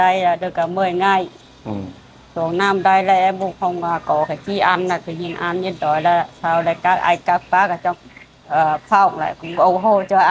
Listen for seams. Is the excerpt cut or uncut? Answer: uncut